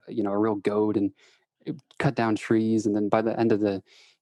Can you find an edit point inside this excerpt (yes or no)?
no